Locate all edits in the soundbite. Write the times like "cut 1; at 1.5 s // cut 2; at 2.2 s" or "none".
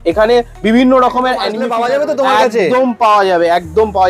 cut 1; at 1.6 s

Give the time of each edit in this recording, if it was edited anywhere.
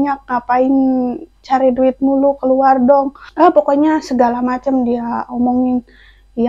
cut 1; at 3.2 s

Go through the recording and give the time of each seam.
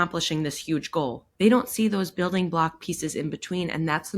cut 1; at 1.2 s

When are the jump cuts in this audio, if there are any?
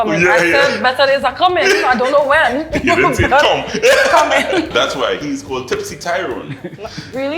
cut 1; at 4.7 s

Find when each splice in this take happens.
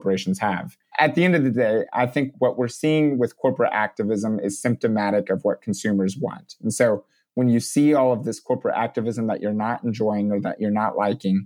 cut 1; at 0.9 s // cut 2; at 2.3 s

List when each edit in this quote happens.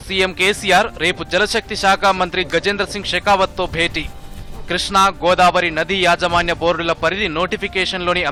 none

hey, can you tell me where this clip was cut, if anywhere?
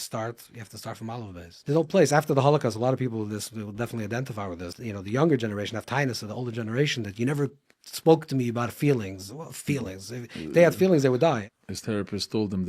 cut 1; at 1.5 s // cut 2; at 4.7 s // cut 3; at 11.4 s

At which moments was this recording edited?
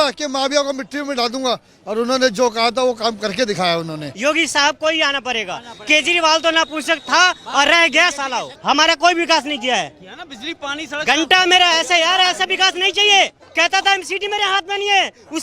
cut 1; at 4.1 s // cut 2; at 8.5 s // cut 3; at 13.4 s

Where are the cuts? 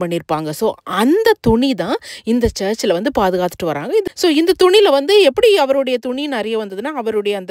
cut 1; at 4.0 s

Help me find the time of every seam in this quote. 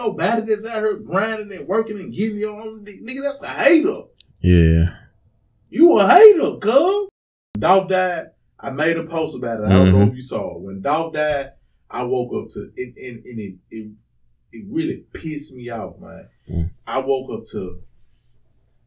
cut 1; at 7.4 s

